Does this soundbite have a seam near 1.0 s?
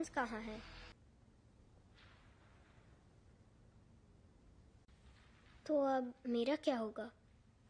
yes; 1 cut; at 1.0 s

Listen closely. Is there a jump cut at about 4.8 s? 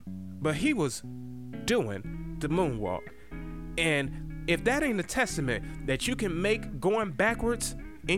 no; 1 cut; at 6.7 s

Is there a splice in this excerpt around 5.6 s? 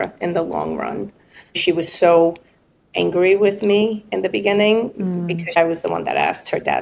yes; 2 cuts; at 1.6 s, 5.6 s

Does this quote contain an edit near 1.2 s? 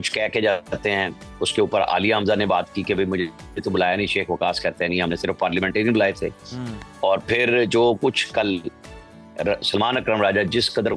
no; 0 cuts

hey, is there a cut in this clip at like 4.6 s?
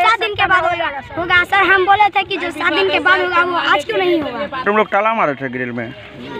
yes; 1 cut; at 4.6 s

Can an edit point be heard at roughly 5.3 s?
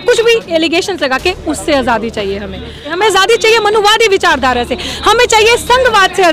no; 1 cut; at 2.9 s

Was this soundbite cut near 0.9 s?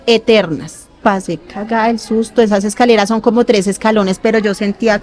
yes; 1 cut; at 0.9 s

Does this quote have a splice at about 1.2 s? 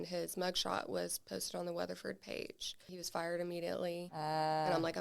no; 2 cuts; at 2.9 s, 4.1 s

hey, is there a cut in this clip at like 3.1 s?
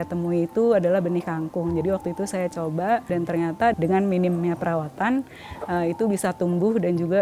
yes; 1 cut; at 3.1 s

